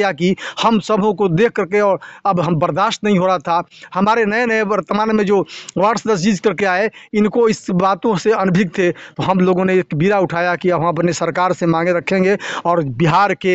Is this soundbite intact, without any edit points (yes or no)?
yes